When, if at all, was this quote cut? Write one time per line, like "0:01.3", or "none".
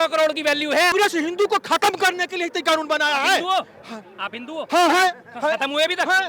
0:00.9